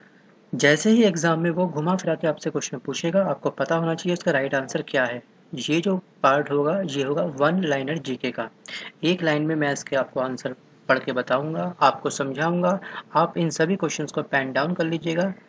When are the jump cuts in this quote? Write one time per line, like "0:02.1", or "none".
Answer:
0:11.4